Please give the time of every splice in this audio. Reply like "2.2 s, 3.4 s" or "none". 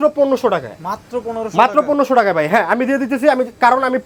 none